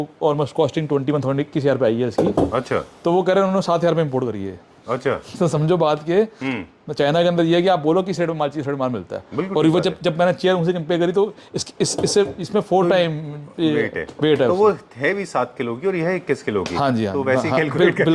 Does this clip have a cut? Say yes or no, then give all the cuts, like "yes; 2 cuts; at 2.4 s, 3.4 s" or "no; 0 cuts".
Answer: no; 0 cuts